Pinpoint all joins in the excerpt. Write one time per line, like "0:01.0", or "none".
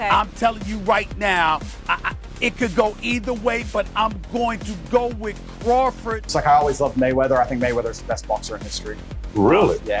0:06.1

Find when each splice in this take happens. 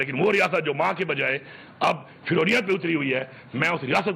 none

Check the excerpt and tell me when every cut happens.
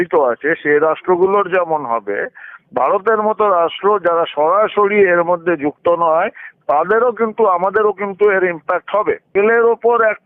0:09.3

